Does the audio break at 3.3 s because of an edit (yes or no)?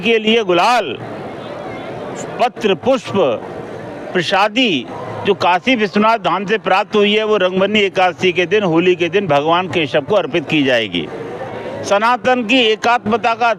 no